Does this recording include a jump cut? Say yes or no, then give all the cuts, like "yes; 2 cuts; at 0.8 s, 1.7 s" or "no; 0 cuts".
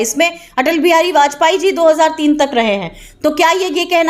no; 0 cuts